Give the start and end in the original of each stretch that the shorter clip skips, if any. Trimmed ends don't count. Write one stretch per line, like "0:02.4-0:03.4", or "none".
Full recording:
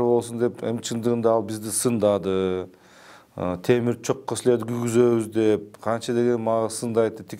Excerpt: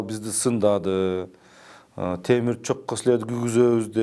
none